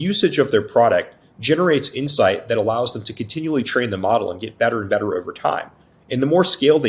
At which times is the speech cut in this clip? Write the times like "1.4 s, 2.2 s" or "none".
none